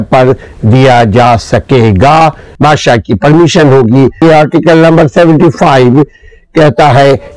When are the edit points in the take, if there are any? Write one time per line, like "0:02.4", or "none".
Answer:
0:02.5
0:04.2

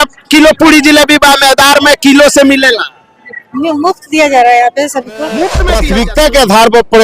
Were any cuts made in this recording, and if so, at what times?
0:05.7

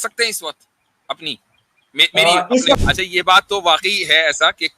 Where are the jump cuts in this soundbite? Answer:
0:02.8

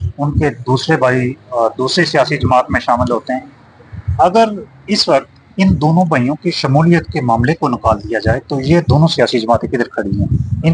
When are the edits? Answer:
none

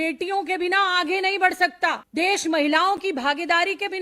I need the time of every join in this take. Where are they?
0:02.0

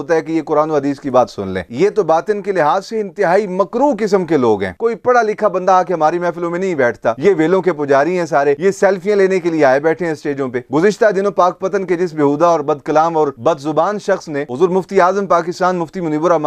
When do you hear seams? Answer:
0:04.7
0:07.2
0:10.7

